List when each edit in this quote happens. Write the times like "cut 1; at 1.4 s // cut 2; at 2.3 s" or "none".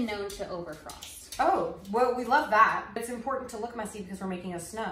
none

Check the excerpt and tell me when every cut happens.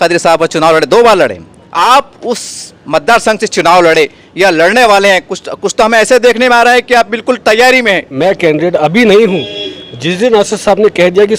cut 1; at 1.7 s // cut 2; at 8.2 s

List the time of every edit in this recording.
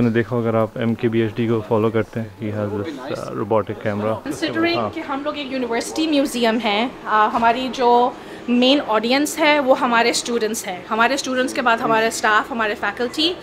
cut 1; at 2.4 s // cut 2; at 4.2 s

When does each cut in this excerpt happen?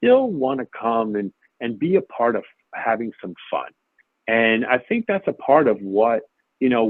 none

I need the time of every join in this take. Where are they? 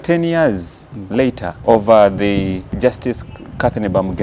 cut 1; at 1.5 s // cut 2; at 2.7 s

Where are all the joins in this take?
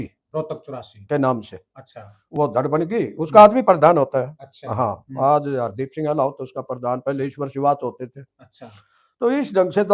none

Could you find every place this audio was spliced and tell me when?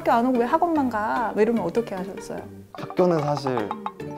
none

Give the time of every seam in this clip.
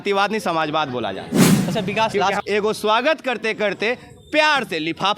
cut 1; at 2.4 s

